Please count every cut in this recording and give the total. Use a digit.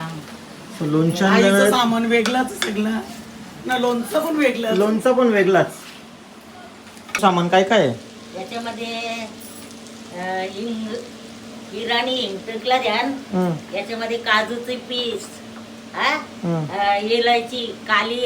1